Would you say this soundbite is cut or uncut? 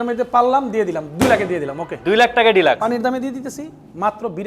cut